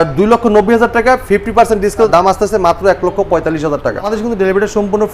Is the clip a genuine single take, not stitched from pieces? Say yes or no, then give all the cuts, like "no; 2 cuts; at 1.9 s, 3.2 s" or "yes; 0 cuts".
no; 2 cuts; at 2.1 s, 4.1 s